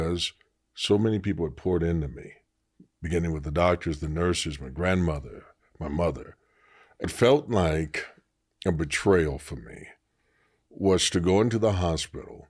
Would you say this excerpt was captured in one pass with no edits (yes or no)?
no